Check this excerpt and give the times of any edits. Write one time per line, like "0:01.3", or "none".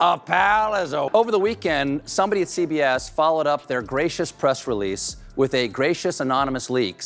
0:01.1